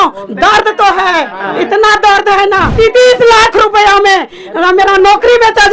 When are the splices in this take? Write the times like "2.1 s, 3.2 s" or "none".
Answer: 2.7 s